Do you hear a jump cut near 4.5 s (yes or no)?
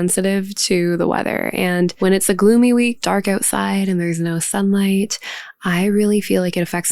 no